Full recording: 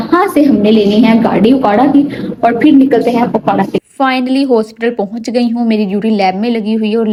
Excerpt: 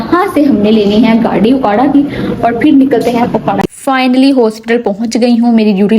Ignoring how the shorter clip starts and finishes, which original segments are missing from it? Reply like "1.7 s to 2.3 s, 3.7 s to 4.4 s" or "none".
3.7 s to 3.8 s